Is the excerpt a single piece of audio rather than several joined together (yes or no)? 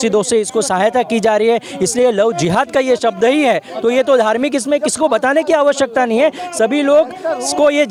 yes